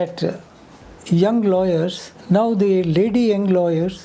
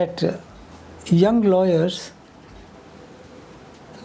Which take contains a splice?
first; 1 cut; at 2.1 s

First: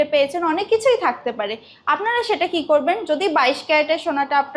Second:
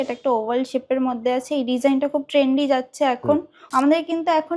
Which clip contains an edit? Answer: second; 1 cut; at 3.6 s

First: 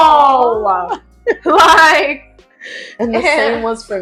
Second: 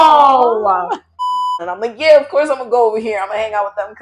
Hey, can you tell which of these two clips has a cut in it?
second; 1 cut; at 1.2 s

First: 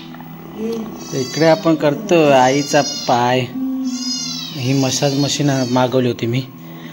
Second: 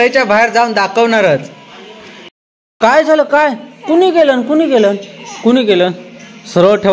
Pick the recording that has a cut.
second; 1 cut; at 2.3 s

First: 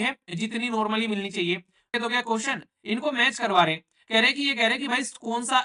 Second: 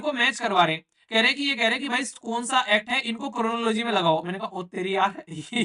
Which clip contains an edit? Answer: first; 1 cut; at 1.9 s

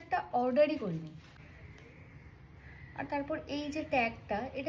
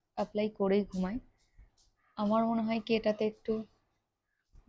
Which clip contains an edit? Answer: first; 1 cut; at 1.2 s

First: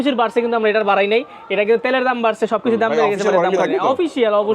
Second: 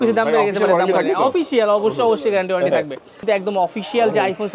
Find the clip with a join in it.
second; 1 cut; at 3.2 s

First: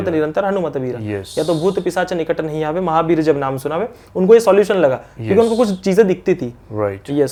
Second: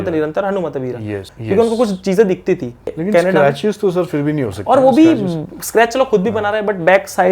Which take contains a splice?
second; 2 cuts; at 1.3 s, 2.9 s

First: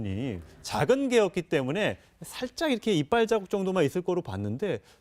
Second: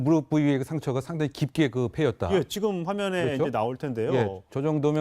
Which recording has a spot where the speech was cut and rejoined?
second; 1 cut; at 3.4 s

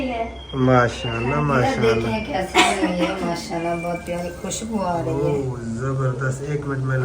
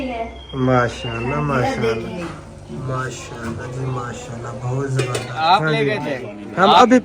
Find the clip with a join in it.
second; 2 cuts; at 2.3 s, 5.3 s

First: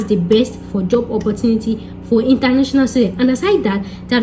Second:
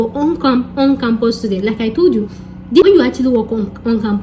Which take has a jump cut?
second; 1 cut; at 2.8 s

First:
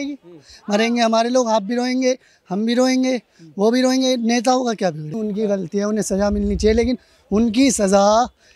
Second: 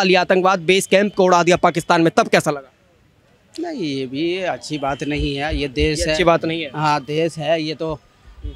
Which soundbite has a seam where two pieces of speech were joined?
first; 1 cut; at 5.2 s

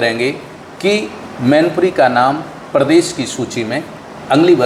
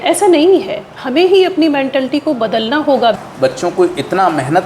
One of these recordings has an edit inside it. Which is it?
second; 1 cut; at 3.2 s

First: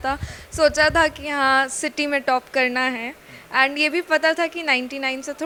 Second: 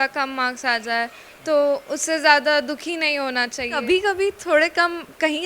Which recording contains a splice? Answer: second; 1 cut; at 3.7 s

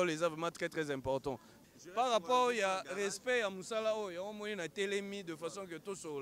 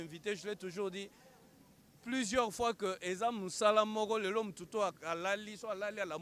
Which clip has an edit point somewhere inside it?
first; 1 cut; at 1.6 s

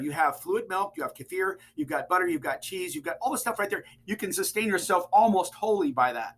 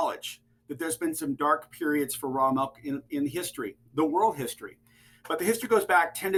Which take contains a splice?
first; 1 cut; at 3.9 s

